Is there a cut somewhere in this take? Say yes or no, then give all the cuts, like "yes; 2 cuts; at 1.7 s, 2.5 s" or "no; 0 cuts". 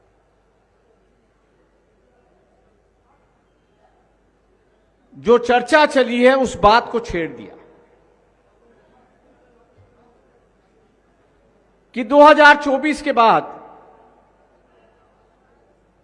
no; 0 cuts